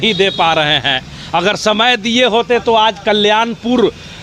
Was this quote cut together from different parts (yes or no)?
no